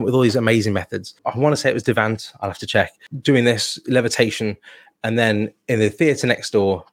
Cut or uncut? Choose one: cut